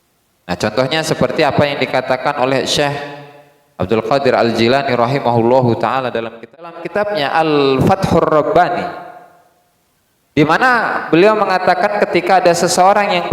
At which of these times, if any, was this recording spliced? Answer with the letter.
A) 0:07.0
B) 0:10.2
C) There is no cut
A